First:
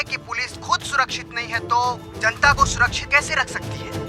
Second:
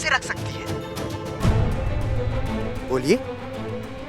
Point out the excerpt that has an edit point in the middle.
second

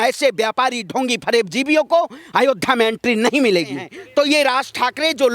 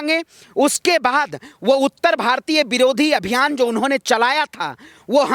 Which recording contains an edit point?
first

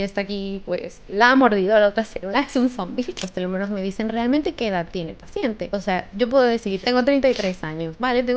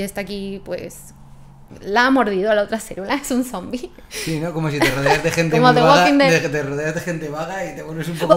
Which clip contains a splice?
first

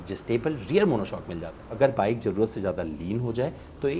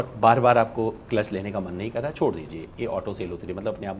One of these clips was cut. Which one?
first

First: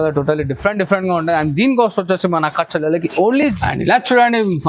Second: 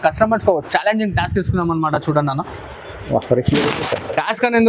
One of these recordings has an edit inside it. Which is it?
first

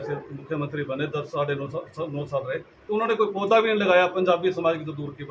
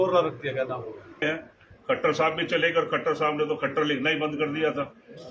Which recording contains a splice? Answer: second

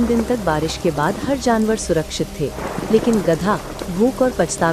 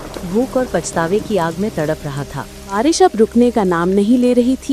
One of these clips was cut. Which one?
second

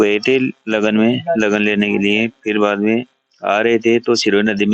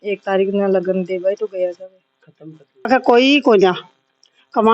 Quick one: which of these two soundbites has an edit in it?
second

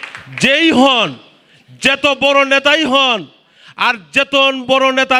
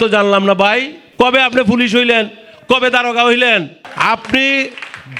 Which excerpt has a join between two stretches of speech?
second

